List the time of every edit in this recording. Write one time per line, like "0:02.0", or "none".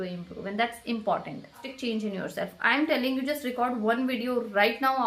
0:01.7